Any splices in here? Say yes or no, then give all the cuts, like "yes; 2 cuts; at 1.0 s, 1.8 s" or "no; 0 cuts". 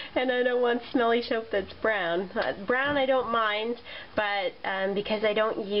no; 0 cuts